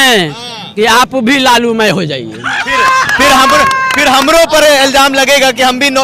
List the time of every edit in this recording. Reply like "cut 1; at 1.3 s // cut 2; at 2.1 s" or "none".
none